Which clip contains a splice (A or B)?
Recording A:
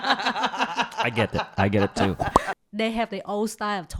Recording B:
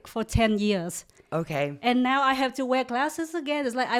A